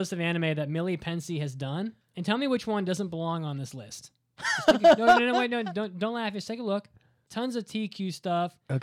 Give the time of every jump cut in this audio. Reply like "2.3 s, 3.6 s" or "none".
7.2 s